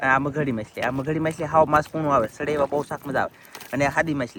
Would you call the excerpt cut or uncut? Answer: uncut